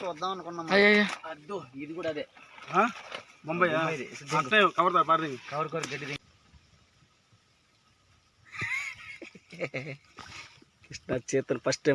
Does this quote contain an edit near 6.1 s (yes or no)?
yes